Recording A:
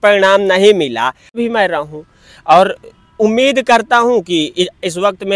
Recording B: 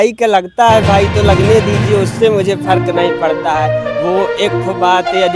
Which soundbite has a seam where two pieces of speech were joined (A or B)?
A